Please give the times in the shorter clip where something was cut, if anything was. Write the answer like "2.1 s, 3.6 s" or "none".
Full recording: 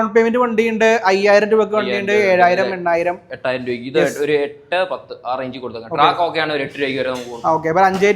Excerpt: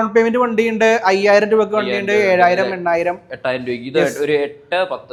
none